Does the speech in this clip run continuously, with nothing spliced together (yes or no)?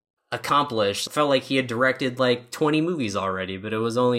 no